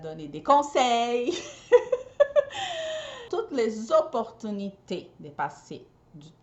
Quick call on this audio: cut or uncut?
cut